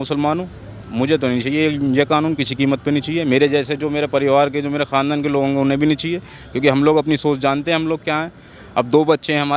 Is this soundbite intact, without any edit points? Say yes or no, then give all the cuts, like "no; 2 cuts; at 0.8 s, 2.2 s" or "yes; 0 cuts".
yes; 0 cuts